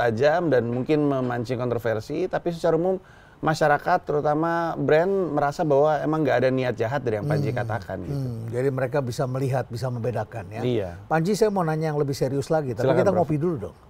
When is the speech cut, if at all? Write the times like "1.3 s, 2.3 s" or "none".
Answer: none